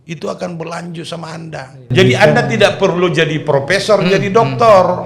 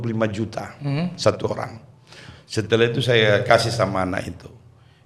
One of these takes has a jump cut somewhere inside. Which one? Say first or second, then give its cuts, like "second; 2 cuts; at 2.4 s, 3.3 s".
first; 1 cut; at 1.9 s